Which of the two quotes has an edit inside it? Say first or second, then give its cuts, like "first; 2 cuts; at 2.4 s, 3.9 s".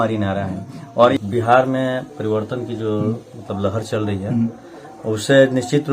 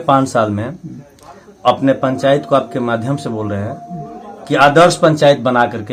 first; 1 cut; at 1.1 s